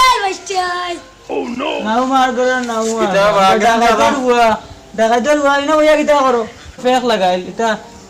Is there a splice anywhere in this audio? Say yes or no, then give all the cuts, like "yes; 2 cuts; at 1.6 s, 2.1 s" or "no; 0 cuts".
yes; 1 cut; at 6.8 s